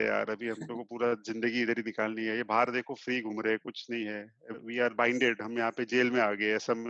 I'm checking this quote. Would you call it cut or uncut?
cut